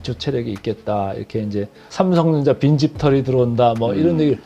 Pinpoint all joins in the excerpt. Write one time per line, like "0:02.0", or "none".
0:01.8